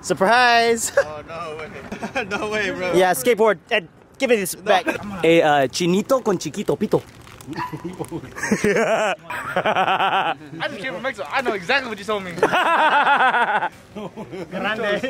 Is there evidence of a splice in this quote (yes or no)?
yes